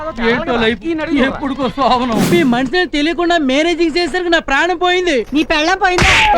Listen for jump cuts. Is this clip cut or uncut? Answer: cut